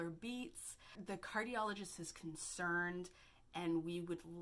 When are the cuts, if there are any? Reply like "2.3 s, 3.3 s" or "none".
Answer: 1.0 s